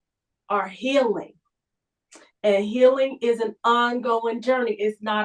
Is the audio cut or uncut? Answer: uncut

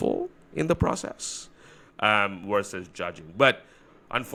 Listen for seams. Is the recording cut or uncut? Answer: uncut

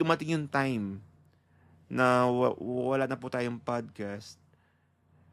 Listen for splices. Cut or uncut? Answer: uncut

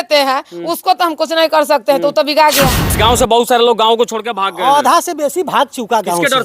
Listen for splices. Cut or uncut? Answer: cut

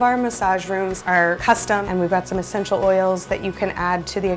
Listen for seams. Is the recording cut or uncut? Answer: cut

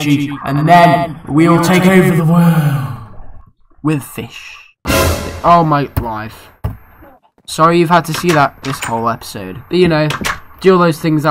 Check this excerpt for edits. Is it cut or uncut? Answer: cut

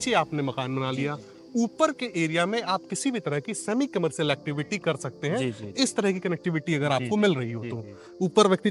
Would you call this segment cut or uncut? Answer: uncut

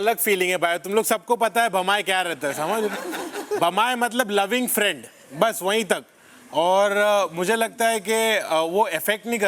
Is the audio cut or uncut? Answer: uncut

